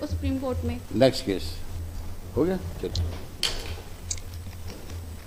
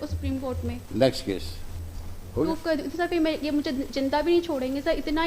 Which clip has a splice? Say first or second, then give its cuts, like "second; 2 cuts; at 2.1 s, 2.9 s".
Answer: second; 1 cut; at 2.5 s